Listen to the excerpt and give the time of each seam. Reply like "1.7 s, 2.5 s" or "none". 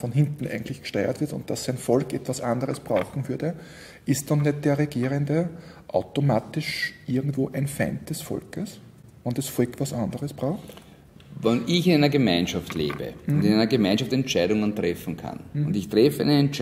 none